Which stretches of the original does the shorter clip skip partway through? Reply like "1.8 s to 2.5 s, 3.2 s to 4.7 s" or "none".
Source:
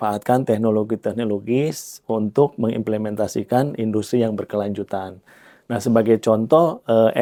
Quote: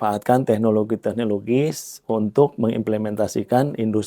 none